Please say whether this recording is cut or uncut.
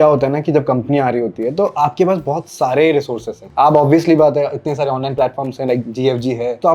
cut